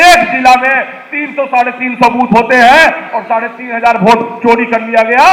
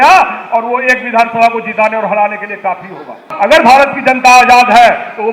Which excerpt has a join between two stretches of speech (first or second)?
second